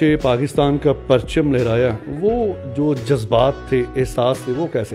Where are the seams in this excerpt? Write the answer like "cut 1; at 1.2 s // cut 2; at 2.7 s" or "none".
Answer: none